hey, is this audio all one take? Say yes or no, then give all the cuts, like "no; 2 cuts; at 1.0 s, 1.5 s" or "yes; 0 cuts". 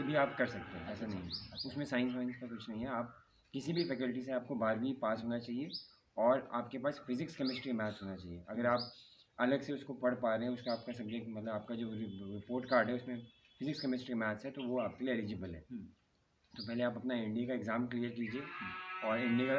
yes; 0 cuts